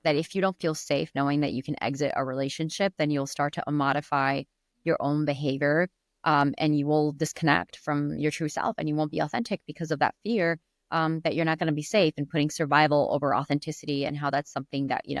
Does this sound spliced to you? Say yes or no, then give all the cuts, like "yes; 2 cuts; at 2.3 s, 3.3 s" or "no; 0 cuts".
no; 0 cuts